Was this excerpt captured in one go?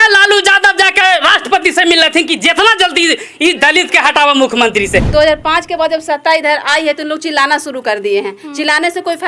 no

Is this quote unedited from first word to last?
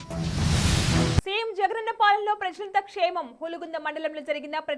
no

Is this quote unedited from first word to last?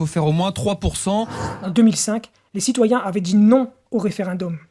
no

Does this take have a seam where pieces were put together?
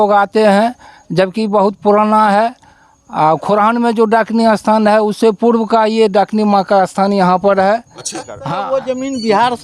yes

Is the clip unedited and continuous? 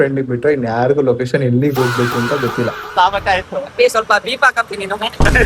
no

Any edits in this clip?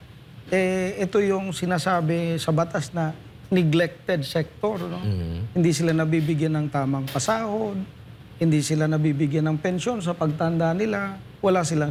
no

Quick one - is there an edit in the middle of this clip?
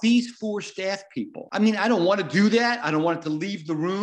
yes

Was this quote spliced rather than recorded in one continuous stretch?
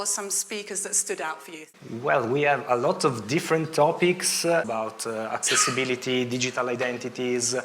yes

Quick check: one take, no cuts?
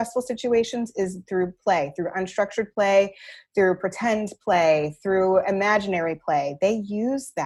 yes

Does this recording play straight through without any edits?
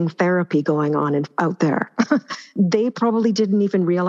no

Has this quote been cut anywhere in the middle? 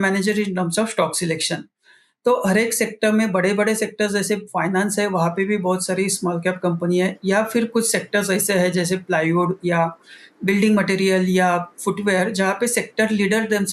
no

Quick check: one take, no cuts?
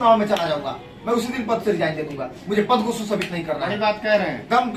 yes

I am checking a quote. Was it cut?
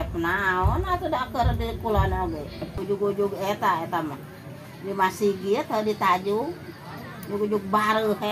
yes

